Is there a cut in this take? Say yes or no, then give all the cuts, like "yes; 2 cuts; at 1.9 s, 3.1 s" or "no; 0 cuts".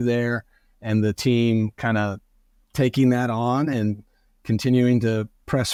no; 0 cuts